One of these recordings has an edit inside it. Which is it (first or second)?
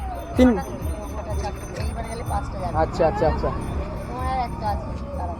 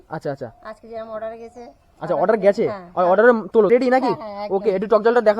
second